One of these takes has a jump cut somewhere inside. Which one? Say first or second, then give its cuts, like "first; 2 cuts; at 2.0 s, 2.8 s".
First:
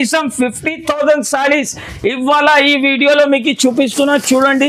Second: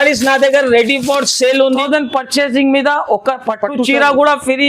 second; 1 cut; at 1.7 s